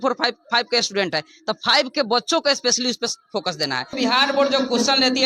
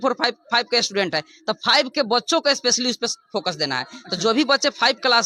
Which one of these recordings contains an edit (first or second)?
first